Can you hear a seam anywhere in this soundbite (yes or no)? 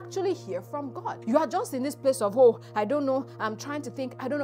yes